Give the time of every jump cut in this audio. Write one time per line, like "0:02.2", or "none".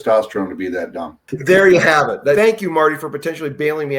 0:01.3
0:02.4

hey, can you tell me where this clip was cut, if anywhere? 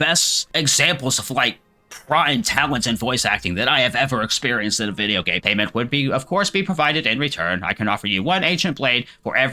0:05.4

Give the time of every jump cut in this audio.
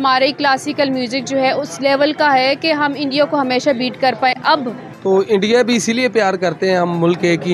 0:04.8

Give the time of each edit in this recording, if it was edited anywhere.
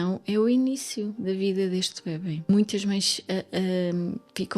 0:02.5

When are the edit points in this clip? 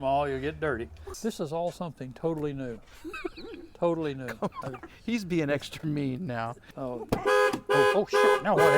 0:01.1
0:06.7

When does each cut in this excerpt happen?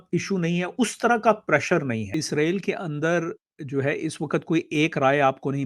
0:02.2

